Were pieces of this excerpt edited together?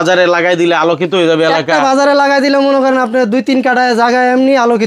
no; 0 cuts

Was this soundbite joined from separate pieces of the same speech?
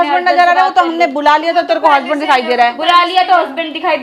no; 0 cuts

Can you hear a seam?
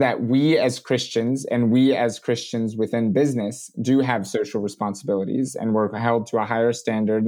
no; 0 cuts

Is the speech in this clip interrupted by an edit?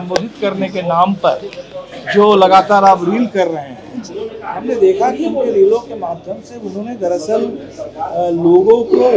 no; 0 cuts

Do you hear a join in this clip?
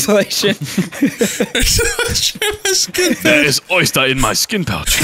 no; 0 cuts

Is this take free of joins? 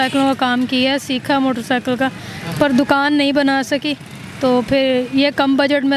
yes; 0 cuts

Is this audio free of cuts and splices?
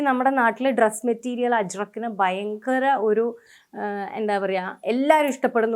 yes; 0 cuts

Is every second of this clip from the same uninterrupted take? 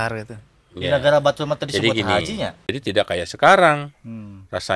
no; 1 cut; at 2.6 s

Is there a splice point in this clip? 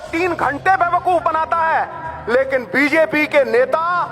no; 0 cuts

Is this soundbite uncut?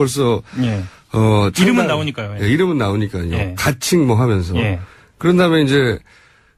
yes; 0 cuts

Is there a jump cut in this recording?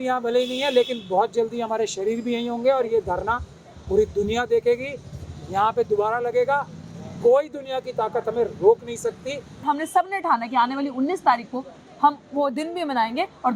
yes; 1 cut; at 9.6 s

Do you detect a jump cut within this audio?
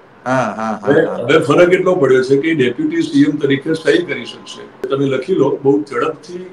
yes; 1 cut; at 4.9 s

